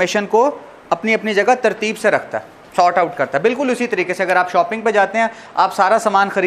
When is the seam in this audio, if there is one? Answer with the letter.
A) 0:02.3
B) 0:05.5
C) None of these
C